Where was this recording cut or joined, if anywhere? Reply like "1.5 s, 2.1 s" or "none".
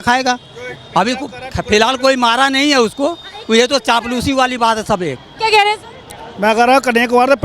5.2 s